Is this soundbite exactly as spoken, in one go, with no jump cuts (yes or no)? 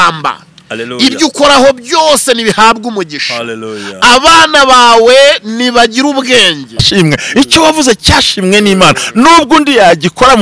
no